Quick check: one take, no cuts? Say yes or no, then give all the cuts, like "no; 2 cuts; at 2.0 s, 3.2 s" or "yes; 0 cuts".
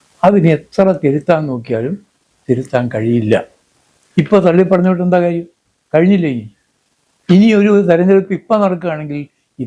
yes; 0 cuts